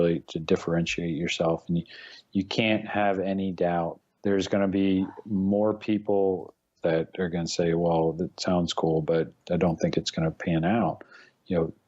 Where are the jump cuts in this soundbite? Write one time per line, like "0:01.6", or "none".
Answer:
0:04.0
0:06.7
0:09.4